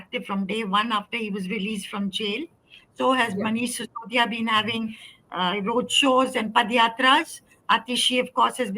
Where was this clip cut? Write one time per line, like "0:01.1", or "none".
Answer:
none